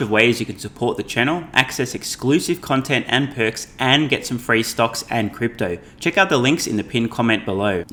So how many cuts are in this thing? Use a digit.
0